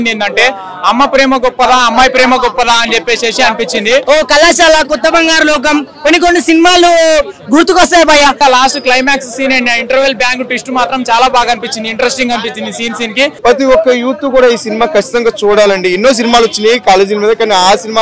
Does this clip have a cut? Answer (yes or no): yes